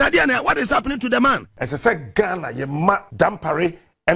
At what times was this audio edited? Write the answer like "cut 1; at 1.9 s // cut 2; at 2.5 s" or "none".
cut 1; at 1.6 s // cut 2; at 3.1 s

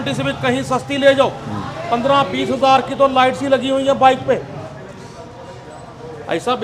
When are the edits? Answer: none

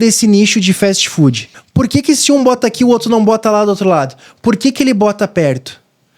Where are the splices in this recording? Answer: cut 1; at 1.5 s

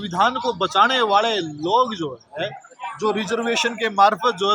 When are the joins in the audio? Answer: none

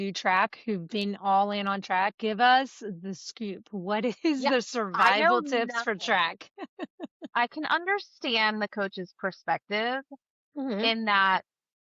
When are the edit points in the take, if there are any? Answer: cut 1; at 7.3 s

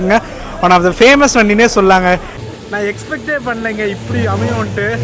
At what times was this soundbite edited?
cut 1; at 2.4 s

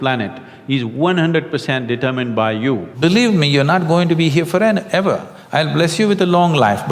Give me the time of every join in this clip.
cut 1; at 2.9 s

